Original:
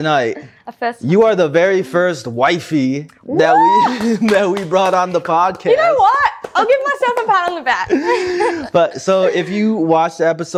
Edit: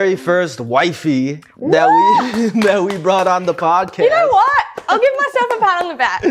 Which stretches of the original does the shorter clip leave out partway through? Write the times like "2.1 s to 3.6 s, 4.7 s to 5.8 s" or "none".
none